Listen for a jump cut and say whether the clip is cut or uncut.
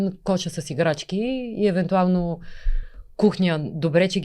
uncut